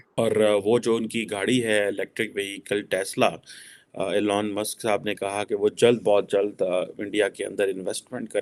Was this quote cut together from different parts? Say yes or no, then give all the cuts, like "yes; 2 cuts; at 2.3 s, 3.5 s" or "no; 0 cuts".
no; 0 cuts